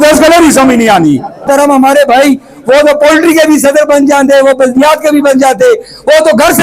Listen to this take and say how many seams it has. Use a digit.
1